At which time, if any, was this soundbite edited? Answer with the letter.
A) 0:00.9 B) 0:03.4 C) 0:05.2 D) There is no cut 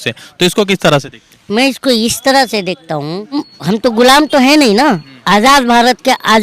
B